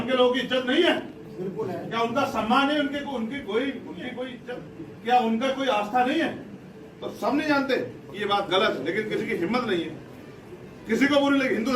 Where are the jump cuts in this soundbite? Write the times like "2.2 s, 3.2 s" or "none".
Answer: 4.3 s

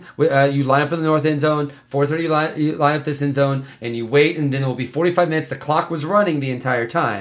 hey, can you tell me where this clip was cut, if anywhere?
none

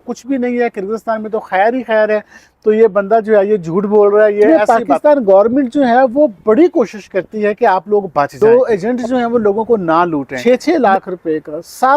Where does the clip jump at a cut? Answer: 4.5 s, 8.3 s, 10.3 s

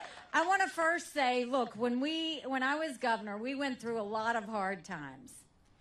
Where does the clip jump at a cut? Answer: 3.4 s

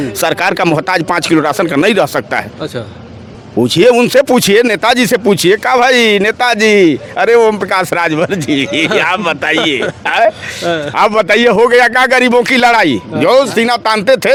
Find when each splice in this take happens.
none

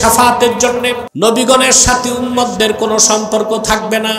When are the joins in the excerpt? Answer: 1.1 s

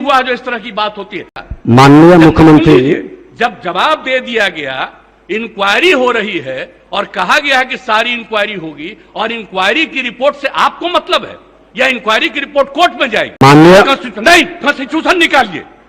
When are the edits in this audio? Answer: 1.3 s, 13.4 s

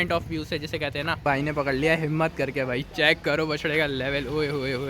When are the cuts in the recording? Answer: 1.2 s

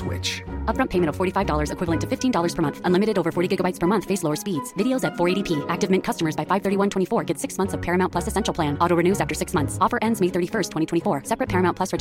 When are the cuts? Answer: none

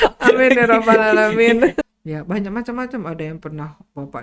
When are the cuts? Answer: 1.8 s

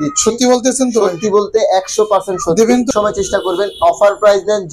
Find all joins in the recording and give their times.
2.9 s

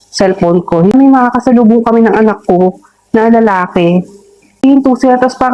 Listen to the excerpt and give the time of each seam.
0.9 s, 4.6 s

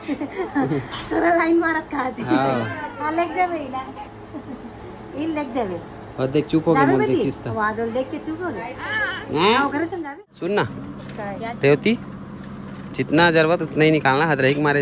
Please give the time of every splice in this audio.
10.1 s

